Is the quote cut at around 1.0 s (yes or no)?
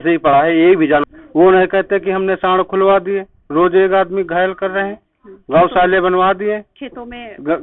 yes